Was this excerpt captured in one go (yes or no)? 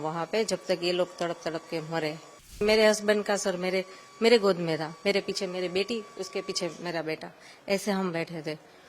no